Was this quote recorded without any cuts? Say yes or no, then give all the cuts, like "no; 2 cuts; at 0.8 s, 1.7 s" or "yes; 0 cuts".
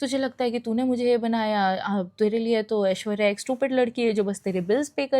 yes; 0 cuts